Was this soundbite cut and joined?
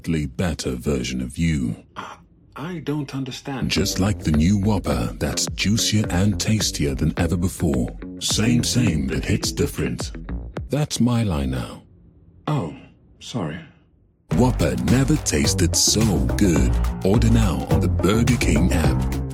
no; 0 cuts

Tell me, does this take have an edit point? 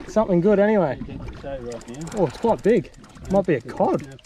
no; 0 cuts

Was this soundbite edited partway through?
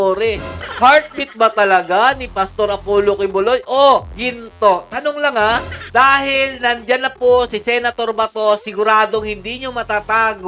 yes; 1 cut; at 5.9 s

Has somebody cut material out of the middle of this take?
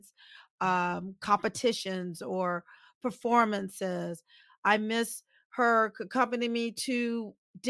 no; 0 cuts

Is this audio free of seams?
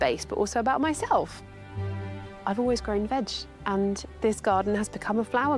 no; 1 cut; at 4.1 s

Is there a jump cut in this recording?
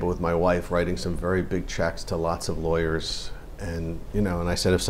no; 0 cuts

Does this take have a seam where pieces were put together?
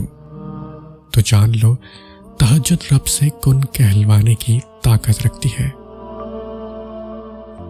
yes; 1 cut; at 5.9 s

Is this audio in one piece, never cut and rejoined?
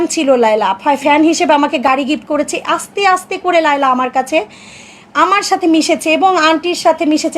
yes; 0 cuts

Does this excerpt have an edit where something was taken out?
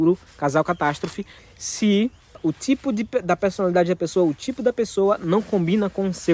yes; 2 cuts; at 1.3 s, 2.4 s

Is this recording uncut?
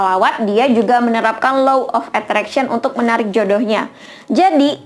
yes; 0 cuts

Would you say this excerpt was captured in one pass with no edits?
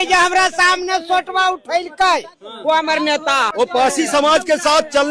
no; 1 cut; at 3.5 s

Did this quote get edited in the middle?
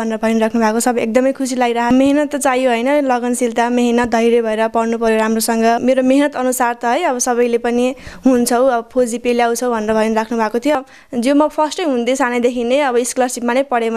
yes; 3 cuts; at 1.9 s, 5.8 s, 10.7 s

